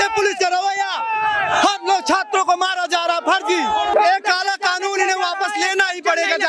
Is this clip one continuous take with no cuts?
no; 1 cut; at 3.9 s

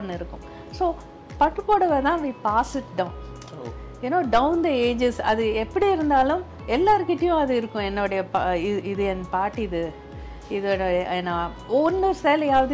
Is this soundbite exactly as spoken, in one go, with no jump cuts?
yes; 0 cuts

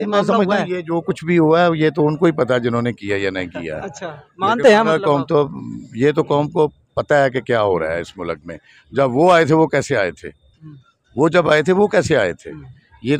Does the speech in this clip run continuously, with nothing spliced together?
yes; 0 cuts

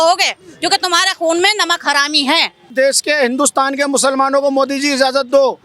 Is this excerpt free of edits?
no; 1 cut; at 2.7 s

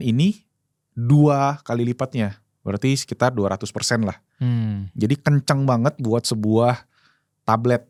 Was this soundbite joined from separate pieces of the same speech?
no; 0 cuts

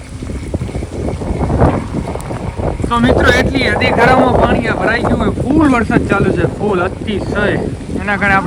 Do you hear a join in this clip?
no; 0 cuts

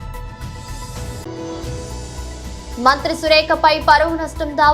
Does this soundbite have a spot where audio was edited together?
no; 0 cuts

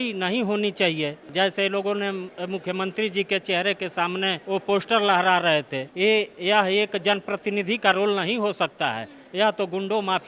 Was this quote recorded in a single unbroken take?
no; 3 cuts; at 1.2 s, 4.4 s, 5.8 s

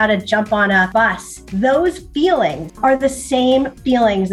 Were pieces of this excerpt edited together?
yes; 2 cuts; at 1.0 s, 2.7 s

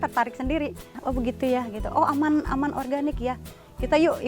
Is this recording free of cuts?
no; 1 cut; at 1.0 s

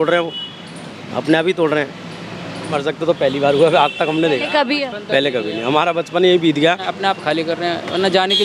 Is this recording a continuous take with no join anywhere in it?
no; 2 cuts; at 2.7 s, 6.9 s

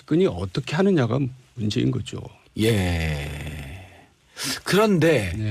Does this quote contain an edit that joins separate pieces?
yes; 1 cut; at 4.6 s

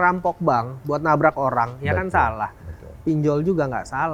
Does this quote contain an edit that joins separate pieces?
no; 0 cuts

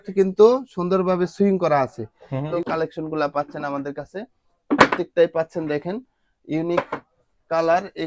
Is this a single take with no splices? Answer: no; 1 cut; at 2.5 s

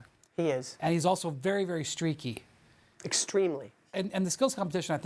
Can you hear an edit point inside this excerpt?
yes; 1 cut; at 3.9 s

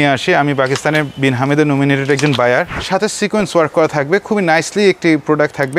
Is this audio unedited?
no; 1 cut; at 2.8 s

